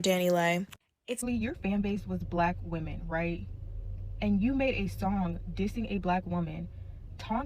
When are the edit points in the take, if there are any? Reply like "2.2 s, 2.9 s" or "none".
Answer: 1.2 s